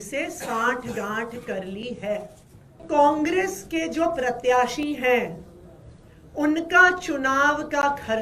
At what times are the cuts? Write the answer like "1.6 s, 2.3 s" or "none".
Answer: 2.8 s